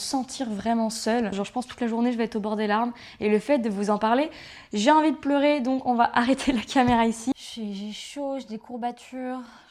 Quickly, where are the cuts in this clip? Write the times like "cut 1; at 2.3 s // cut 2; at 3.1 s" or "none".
cut 1; at 1.4 s // cut 2; at 7.3 s